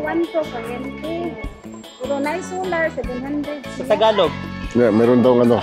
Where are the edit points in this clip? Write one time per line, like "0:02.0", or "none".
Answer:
none